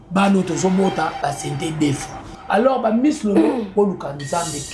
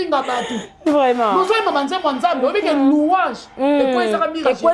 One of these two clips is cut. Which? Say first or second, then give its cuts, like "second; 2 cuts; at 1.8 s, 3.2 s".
first; 1 cut; at 2.2 s